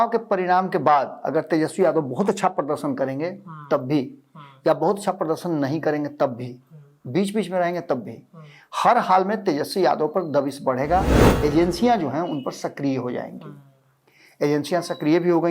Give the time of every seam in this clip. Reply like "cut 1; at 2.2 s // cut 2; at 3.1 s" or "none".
cut 1; at 11.2 s